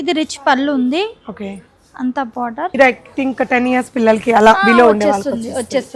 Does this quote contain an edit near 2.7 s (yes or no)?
yes